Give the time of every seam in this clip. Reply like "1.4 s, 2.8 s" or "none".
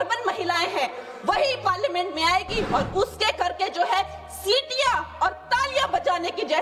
none